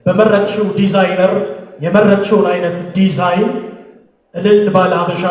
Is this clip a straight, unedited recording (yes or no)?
yes